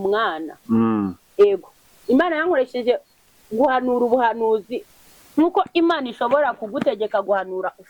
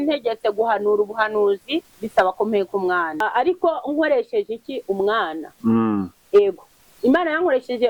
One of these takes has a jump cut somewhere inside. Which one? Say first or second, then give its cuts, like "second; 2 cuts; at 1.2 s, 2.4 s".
second; 1 cut; at 3.2 s